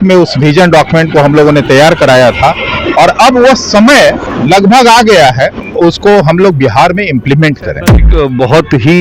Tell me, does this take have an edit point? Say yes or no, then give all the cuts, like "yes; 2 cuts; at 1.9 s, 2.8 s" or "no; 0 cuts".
yes; 3 cuts; at 4.3 s, 5.6 s, 8.0 s